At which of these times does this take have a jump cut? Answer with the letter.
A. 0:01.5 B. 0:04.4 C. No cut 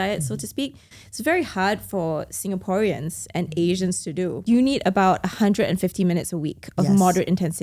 B